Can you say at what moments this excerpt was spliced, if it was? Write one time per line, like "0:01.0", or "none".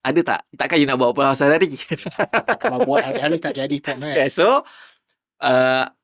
none

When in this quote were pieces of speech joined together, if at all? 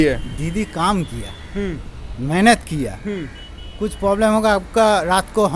none

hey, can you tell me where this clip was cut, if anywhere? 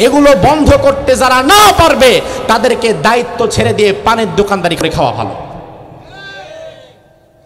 0:04.8

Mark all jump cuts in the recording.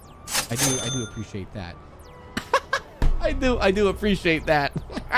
none

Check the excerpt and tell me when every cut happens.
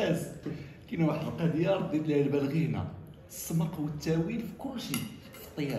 none

